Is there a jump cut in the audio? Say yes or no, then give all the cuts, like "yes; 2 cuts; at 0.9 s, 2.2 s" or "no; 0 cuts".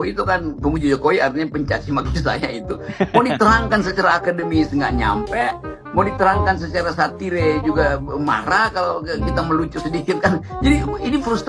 no; 0 cuts